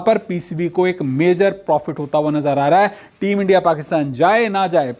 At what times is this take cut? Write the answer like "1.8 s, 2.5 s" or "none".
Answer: none